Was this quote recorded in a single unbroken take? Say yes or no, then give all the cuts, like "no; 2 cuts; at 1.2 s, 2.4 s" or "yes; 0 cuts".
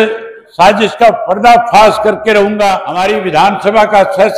no; 1 cut; at 2.9 s